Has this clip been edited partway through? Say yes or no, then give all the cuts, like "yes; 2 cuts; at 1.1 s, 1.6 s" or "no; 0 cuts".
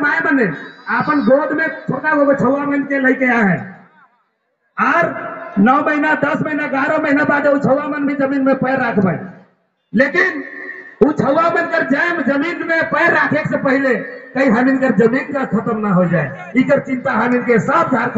no; 0 cuts